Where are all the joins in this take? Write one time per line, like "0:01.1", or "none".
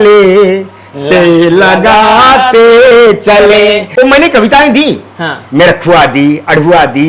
0:03.8